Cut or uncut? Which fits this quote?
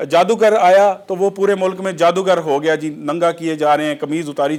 uncut